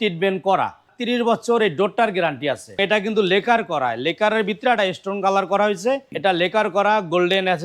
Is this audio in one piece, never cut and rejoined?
no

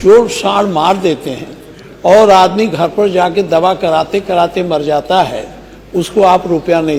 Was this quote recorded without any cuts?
yes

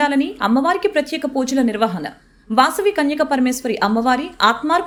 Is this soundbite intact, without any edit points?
yes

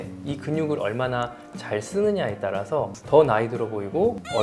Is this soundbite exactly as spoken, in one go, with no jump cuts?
no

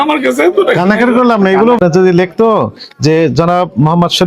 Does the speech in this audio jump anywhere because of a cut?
yes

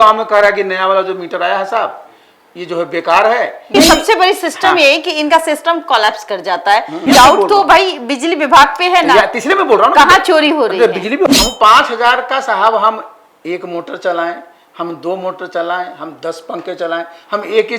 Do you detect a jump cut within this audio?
yes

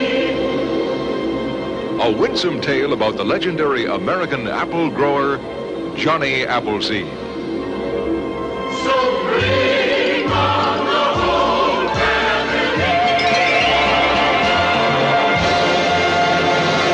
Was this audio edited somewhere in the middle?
no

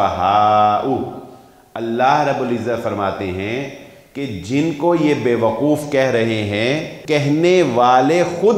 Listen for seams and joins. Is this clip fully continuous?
no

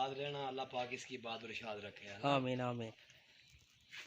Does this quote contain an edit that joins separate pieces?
yes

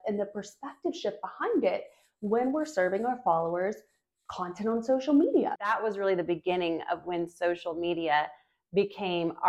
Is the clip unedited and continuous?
no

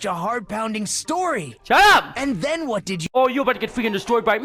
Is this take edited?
yes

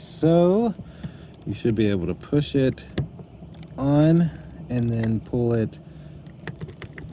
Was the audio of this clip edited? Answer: no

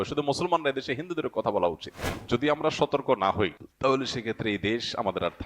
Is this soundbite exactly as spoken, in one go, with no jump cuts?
no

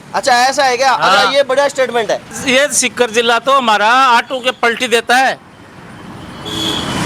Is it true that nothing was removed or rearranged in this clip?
no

